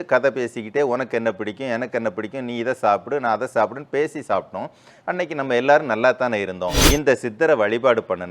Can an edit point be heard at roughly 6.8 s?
yes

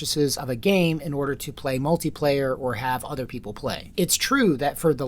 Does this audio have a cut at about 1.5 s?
no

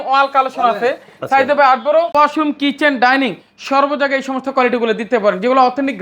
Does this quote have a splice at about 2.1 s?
yes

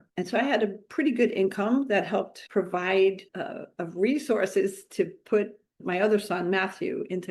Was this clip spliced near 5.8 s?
yes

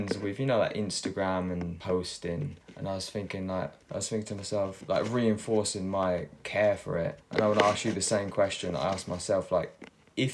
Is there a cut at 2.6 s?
yes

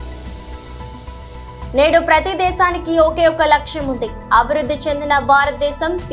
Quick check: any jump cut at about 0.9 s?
yes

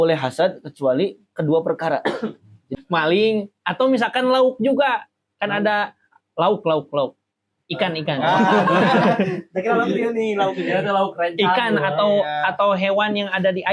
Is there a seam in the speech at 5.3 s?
no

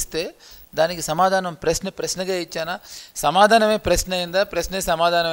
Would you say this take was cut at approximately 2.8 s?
no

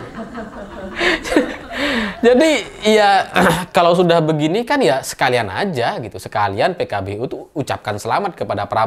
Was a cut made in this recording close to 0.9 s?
yes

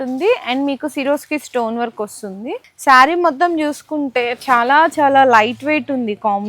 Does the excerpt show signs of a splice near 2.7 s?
yes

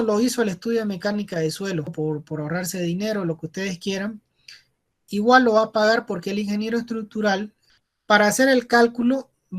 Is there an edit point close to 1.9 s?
yes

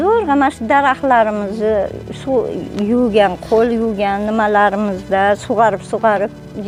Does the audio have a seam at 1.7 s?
no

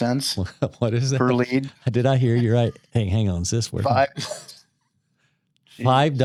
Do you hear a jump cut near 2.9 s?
no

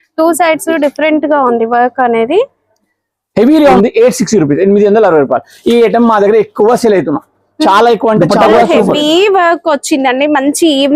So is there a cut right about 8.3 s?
yes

